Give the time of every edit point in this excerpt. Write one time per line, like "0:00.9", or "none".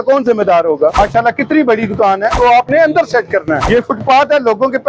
0:00.9
0:02.3
0:03.6